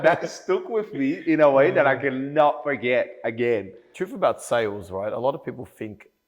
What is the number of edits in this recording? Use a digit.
1